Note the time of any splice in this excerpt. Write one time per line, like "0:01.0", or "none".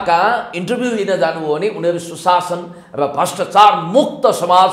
none